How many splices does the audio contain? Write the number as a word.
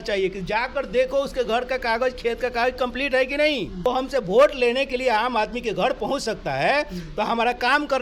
one